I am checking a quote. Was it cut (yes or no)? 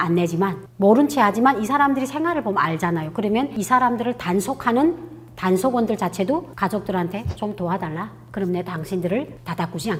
no